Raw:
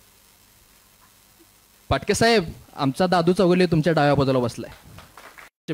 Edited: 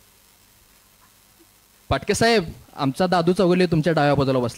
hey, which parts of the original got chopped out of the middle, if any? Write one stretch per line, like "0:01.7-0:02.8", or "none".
none